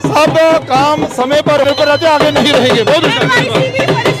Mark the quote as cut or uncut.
cut